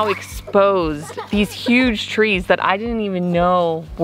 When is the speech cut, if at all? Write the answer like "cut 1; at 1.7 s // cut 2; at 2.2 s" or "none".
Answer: none